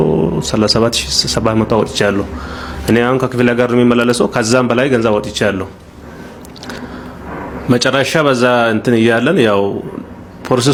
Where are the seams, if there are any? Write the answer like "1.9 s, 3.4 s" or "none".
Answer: none